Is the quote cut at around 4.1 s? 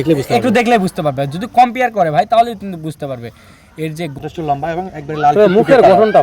yes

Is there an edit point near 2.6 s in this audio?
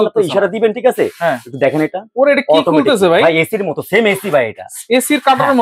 no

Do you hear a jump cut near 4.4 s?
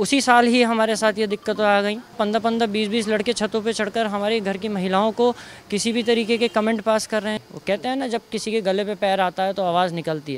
no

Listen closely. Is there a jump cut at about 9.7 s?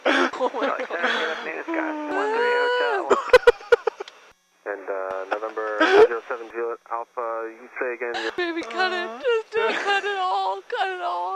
no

